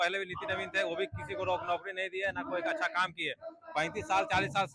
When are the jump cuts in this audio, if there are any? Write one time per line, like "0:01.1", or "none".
none